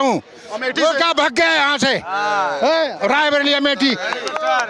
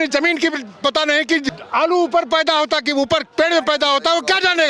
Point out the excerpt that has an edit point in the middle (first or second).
second